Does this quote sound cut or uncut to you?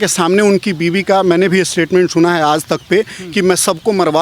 uncut